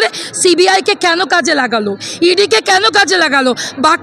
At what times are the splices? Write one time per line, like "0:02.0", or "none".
none